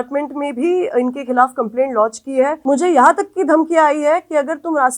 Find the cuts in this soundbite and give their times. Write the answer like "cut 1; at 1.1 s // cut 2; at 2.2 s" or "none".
cut 1; at 2.6 s

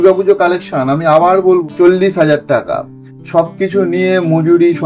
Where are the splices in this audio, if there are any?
cut 1; at 1.7 s

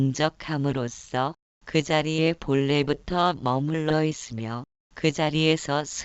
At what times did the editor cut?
cut 1; at 1.2 s

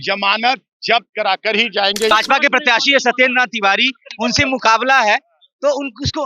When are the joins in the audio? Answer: cut 1; at 2.1 s

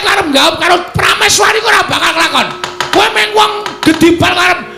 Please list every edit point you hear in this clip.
cut 1; at 2.4 s

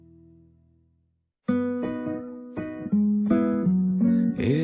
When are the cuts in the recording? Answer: cut 1; at 1.3 s

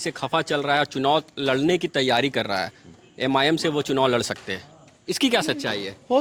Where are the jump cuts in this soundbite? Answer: none

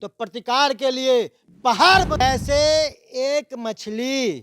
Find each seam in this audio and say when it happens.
cut 1; at 2.2 s

